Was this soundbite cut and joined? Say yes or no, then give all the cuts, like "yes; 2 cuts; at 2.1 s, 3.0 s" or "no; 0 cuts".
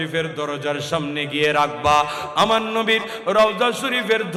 no; 0 cuts